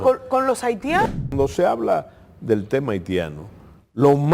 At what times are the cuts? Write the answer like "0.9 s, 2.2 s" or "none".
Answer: 1.0 s